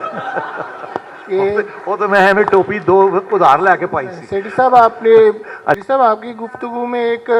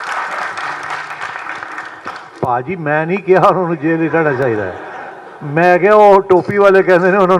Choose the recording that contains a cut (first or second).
first